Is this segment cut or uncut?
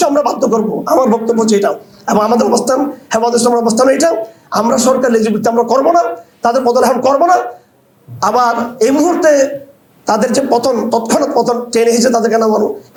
uncut